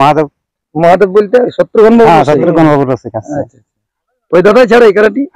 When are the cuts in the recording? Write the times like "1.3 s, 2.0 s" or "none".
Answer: none